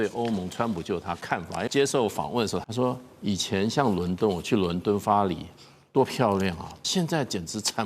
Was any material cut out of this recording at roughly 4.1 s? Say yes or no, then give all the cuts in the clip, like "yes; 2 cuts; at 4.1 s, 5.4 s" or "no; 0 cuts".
no; 3 cuts; at 1.7 s, 2.6 s, 6.7 s